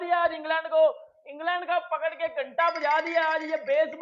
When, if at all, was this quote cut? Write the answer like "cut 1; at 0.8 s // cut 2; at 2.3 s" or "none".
none